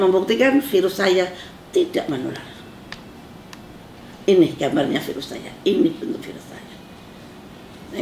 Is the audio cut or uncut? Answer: uncut